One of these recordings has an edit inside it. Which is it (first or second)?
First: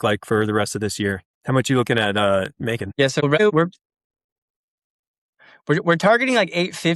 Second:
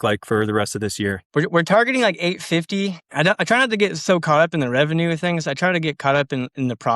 second